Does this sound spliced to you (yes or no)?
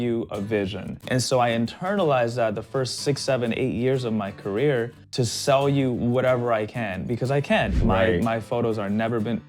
yes